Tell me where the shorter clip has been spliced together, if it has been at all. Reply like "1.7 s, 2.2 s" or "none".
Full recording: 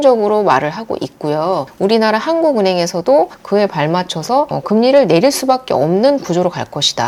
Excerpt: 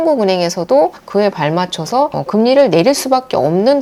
none